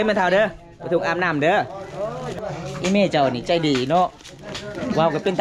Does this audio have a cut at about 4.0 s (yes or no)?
no